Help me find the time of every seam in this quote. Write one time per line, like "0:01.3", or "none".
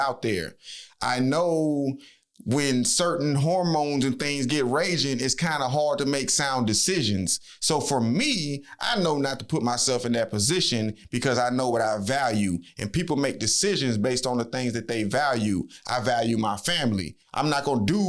0:17.2